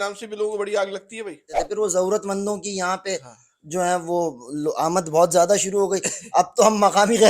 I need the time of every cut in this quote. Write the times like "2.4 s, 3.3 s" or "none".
1.6 s